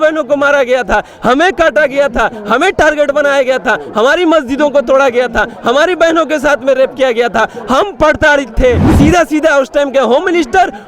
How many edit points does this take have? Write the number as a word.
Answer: one